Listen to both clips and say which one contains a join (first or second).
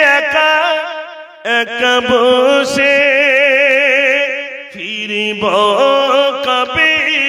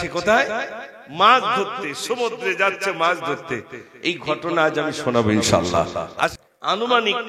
second